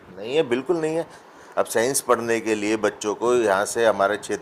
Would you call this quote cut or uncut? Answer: cut